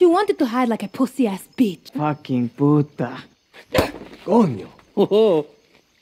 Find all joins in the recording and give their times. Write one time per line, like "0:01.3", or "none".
0:01.9